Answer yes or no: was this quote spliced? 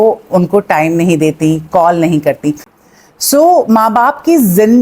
yes